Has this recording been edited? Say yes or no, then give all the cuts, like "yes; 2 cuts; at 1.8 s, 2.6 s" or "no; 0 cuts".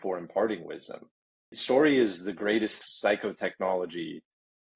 yes; 2 cuts; at 1.5 s, 2.8 s